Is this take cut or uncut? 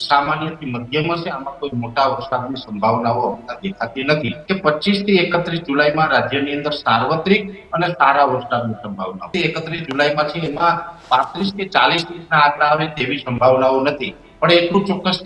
cut